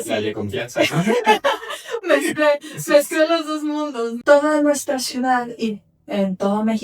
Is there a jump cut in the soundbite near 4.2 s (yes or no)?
yes